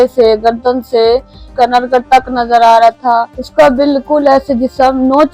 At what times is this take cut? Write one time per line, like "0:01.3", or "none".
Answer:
0:01.5
0:03.4

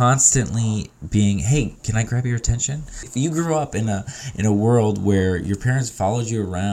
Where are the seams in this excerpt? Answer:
0:03.1

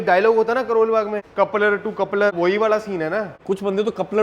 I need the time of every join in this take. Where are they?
0:01.2
0:02.3
0:03.3

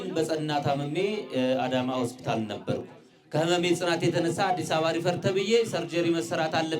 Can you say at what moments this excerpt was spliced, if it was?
none

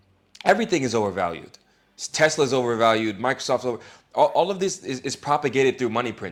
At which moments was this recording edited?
none

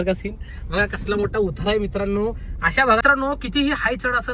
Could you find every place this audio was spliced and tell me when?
0:03.0

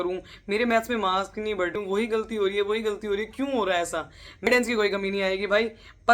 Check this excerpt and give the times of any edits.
0:01.7
0:04.5

